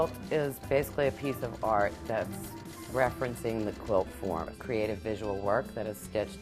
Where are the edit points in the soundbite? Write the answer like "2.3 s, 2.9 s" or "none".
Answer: 4.5 s

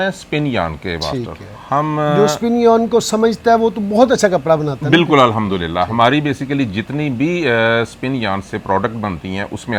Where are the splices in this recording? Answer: none

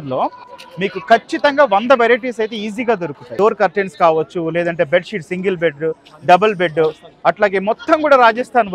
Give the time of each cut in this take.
3.3 s

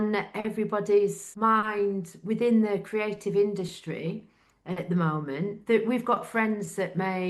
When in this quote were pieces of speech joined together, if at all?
1.2 s, 5.6 s

